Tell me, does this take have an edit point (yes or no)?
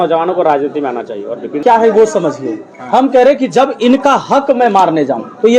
yes